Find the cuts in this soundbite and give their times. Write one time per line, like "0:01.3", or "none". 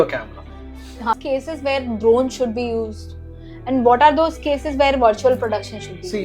0:01.1